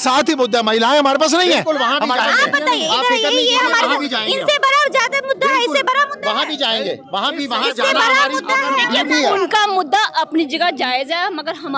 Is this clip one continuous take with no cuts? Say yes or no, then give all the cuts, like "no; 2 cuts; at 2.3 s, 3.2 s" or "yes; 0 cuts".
yes; 0 cuts